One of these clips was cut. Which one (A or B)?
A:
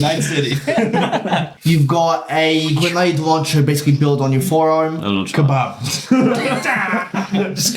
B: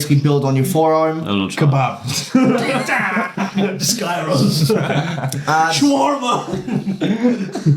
A